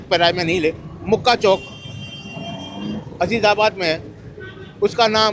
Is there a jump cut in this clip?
no; 0 cuts

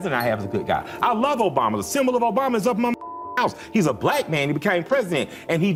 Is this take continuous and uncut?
yes; 0 cuts

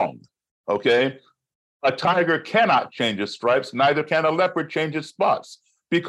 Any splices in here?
no; 0 cuts

